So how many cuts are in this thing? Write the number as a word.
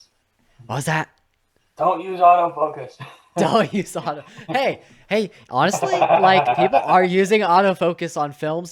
zero